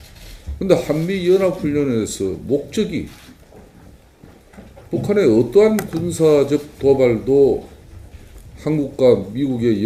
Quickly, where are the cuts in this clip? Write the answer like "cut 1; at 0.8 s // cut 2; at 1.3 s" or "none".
none